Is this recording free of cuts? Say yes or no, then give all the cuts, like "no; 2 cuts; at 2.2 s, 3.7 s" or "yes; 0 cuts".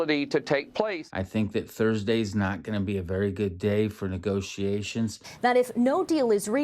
no; 2 cuts; at 1.0 s, 5.2 s